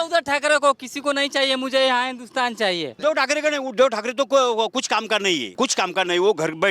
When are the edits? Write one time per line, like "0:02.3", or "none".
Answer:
0:02.9
0:05.5

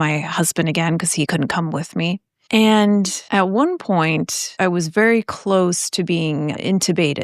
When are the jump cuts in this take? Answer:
0:01.3
0:02.3
0:03.2
0:04.4

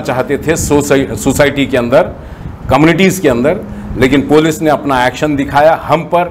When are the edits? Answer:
none

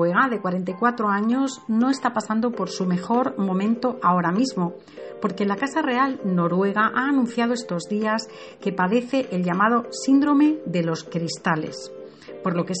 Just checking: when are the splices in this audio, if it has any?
0:02.4

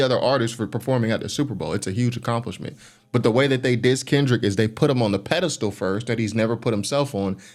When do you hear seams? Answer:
none

